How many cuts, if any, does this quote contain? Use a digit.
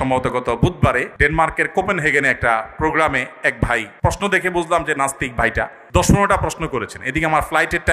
3